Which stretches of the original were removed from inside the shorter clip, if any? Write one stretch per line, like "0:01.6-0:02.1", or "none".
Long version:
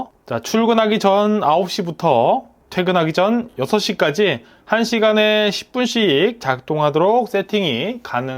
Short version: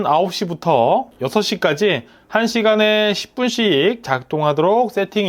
0:02.6-0:03.6